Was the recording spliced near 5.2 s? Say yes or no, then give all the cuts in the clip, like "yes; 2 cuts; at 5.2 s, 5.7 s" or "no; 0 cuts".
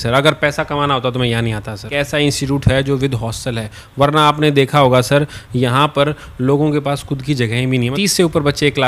no; 2 cuts; at 1.9 s, 7.9 s